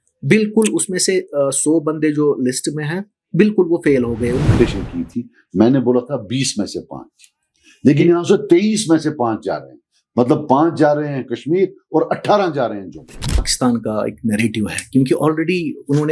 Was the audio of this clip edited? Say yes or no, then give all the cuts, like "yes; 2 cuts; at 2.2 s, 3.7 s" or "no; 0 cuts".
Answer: yes; 2 cuts; at 4.6 s, 13.5 s